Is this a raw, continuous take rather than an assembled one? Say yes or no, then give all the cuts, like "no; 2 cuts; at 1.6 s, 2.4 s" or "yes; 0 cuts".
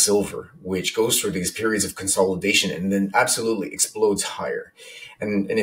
yes; 0 cuts